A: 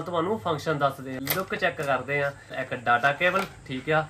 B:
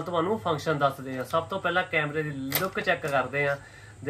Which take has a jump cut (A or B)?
A